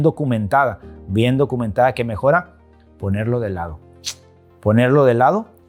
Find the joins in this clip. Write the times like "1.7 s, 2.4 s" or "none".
none

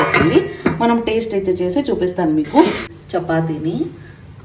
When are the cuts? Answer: 2.9 s

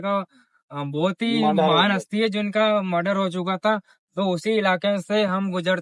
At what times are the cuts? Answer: none

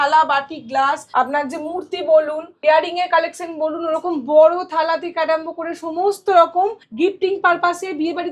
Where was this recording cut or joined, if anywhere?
1.0 s, 2.4 s, 6.8 s

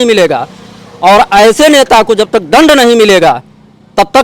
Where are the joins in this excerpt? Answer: none

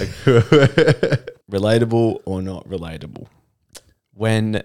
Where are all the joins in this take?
1.3 s

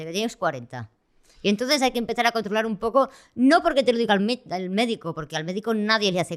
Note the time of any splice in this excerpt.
none

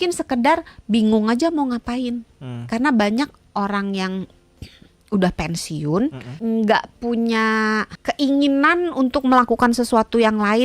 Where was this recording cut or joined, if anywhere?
6.3 s, 7.9 s

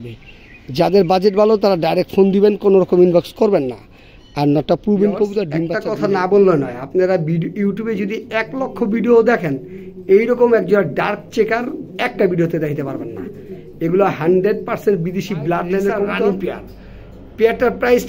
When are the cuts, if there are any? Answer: 5.8 s, 16.1 s

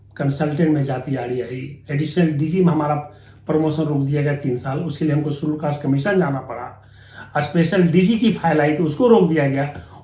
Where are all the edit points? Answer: none

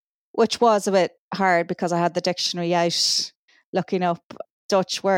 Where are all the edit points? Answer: none

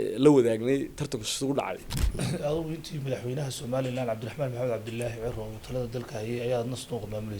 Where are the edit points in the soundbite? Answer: 1.9 s

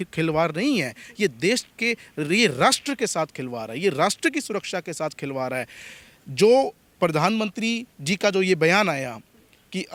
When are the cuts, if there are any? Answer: none

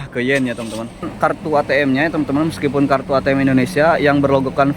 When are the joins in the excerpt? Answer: 1.1 s

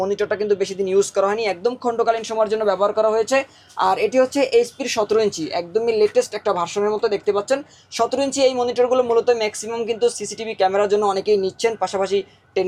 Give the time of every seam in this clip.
none

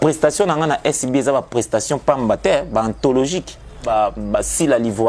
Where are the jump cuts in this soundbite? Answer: 3.9 s

